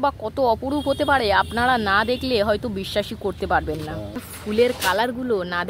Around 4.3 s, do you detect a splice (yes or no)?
yes